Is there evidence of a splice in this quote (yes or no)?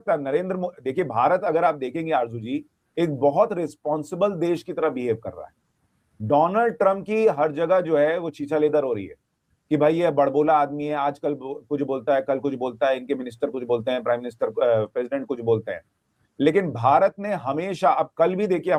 no